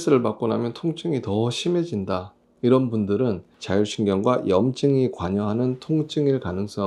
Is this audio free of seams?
no; 1 cut; at 3.5 s

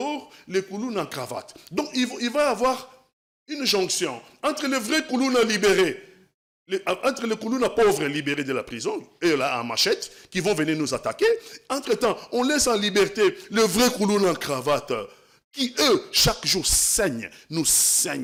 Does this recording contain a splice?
no; 0 cuts

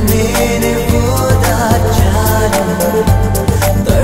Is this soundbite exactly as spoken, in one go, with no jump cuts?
yes; 0 cuts

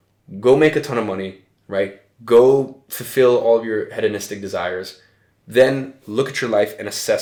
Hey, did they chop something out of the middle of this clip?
no; 0 cuts

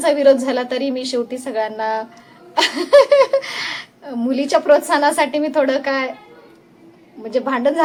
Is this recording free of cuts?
yes; 0 cuts

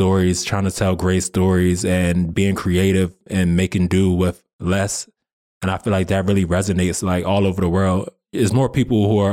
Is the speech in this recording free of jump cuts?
yes; 0 cuts

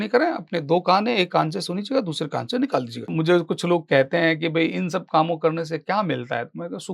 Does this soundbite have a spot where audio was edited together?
yes; 1 cut; at 3.1 s

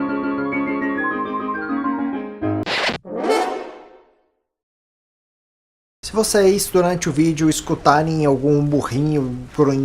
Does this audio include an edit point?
yes; 1 cut; at 3.0 s

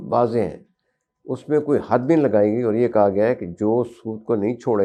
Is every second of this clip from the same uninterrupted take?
yes; 0 cuts

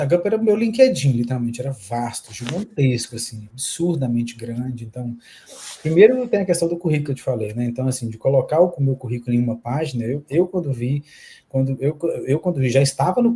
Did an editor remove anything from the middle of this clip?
no; 0 cuts

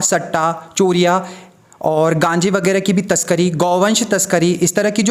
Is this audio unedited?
yes; 0 cuts

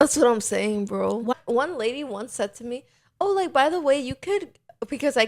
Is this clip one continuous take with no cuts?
no; 1 cut; at 1.3 s

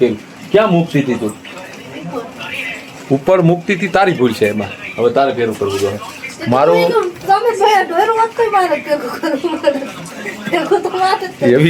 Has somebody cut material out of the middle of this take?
no; 0 cuts

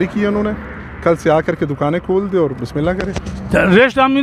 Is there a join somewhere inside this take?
no; 0 cuts

